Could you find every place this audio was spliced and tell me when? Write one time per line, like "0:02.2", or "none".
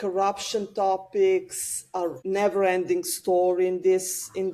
none